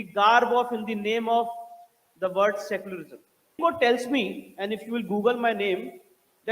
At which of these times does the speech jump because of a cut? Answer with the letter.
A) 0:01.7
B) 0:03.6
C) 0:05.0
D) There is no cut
B